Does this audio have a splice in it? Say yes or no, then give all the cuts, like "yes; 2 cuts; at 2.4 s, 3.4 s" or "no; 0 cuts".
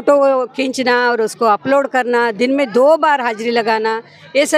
no; 0 cuts